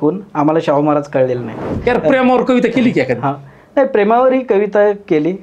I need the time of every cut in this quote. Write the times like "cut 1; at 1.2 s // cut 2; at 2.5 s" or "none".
cut 1; at 1.7 s